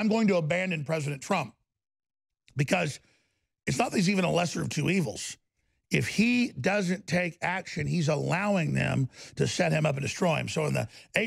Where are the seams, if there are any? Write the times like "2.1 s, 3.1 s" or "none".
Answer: none